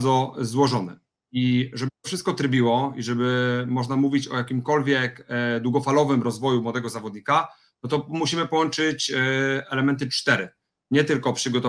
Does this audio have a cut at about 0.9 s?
no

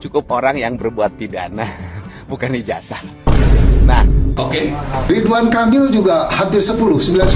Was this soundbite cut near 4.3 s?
yes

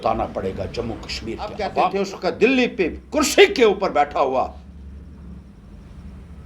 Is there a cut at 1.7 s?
yes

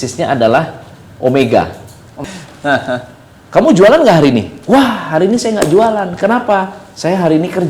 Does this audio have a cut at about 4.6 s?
no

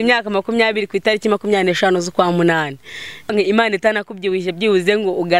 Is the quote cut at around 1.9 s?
no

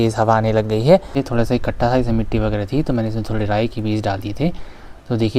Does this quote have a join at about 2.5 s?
no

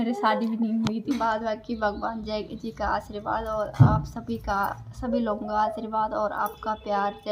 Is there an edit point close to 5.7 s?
no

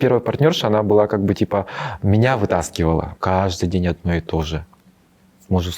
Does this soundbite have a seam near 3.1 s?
yes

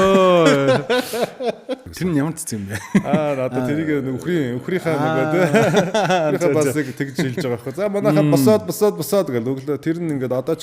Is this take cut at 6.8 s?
no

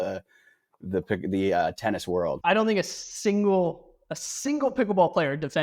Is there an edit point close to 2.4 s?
yes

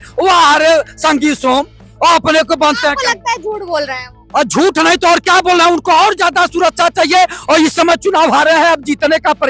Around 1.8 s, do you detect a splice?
no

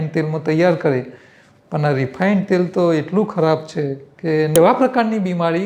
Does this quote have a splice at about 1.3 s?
no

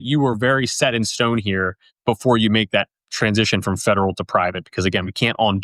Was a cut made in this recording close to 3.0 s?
yes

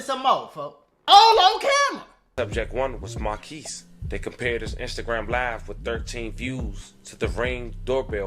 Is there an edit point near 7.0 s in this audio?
no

